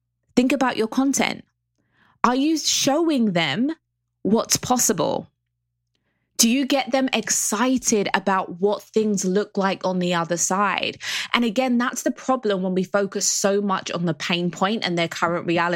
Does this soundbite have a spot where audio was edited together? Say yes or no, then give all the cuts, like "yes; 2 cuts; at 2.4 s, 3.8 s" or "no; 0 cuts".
no; 0 cuts